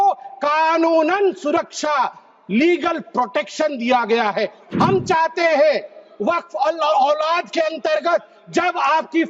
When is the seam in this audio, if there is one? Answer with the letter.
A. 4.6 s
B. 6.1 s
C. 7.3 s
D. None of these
A